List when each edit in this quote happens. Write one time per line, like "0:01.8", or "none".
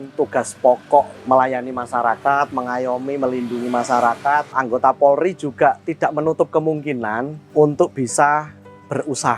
0:01.2
0:04.5

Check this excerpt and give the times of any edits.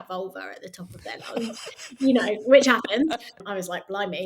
0:03.3

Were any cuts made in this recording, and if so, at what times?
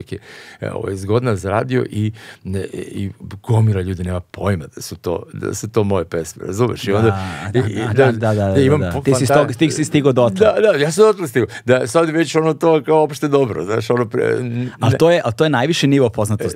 none

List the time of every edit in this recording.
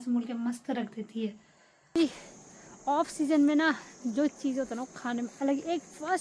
0:02.0

